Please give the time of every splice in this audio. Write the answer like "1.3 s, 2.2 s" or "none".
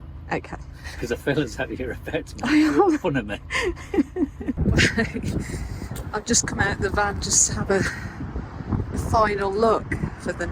4.6 s